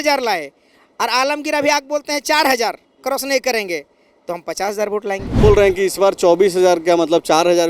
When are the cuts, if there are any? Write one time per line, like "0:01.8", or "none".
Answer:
0:05.4